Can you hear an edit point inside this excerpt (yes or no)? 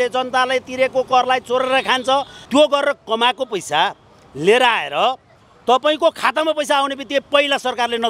yes